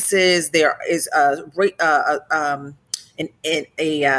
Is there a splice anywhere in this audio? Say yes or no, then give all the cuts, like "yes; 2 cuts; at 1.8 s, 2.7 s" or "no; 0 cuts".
no; 0 cuts